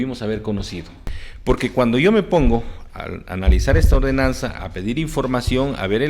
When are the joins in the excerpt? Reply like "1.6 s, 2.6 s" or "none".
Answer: 1.0 s